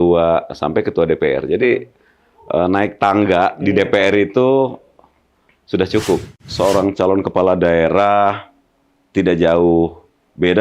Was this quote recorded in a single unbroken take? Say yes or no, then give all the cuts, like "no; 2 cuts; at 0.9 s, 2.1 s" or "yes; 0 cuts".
no; 1 cut; at 6.4 s